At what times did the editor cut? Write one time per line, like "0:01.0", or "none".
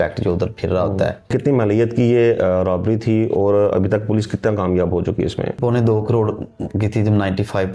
0:01.3
0:05.6

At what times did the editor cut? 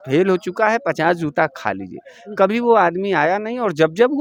none

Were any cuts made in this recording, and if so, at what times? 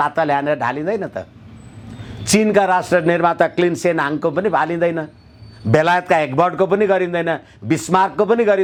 none

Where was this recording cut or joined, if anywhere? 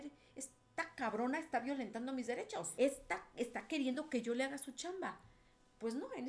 0:02.7

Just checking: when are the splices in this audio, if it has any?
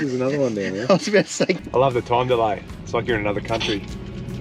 0:01.6

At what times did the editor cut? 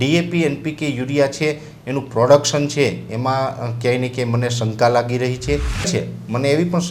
0:05.9

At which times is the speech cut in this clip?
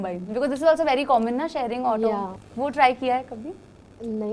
0:02.4

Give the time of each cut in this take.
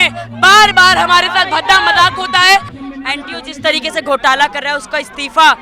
0:02.8

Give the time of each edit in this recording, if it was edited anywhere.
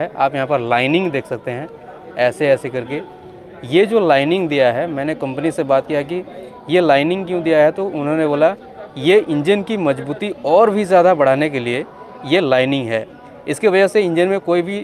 none

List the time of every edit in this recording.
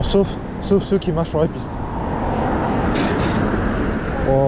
none

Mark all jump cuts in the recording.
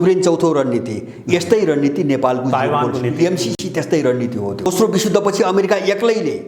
0:04.7

